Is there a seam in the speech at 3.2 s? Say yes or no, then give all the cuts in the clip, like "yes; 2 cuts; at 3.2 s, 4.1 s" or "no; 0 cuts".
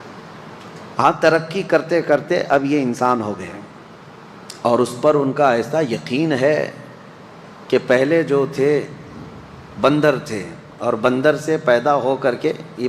no; 1 cut; at 1.4 s